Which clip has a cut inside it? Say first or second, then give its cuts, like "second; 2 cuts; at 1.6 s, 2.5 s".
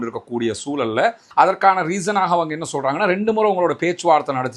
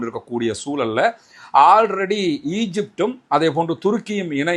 first; 1 cut; at 1.2 s